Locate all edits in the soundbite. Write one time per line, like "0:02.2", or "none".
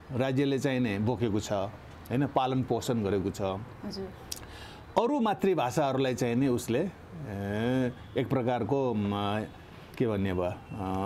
none